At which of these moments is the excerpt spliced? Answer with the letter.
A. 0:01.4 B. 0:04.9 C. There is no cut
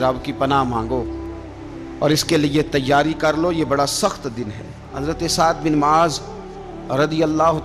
B